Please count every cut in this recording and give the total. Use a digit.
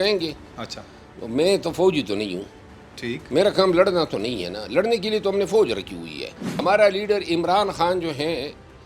1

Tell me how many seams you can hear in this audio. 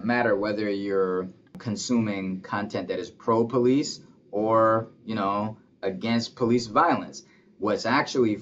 1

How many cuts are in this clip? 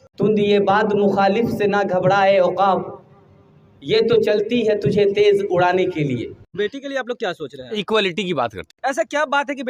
2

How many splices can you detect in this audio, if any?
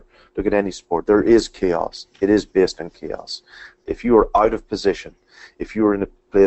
2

